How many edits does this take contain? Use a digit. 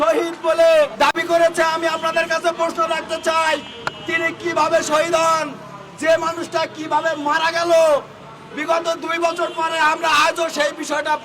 1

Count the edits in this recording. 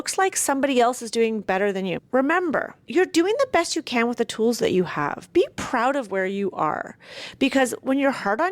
2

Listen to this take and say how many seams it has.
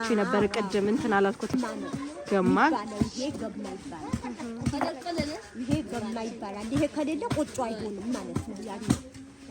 1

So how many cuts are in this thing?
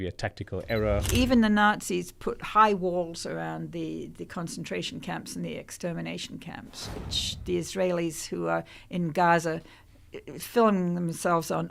2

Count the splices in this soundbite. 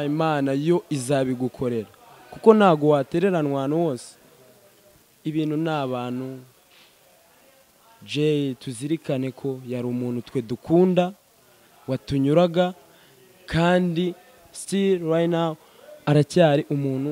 0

